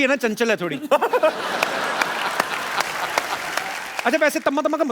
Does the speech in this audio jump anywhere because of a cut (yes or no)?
yes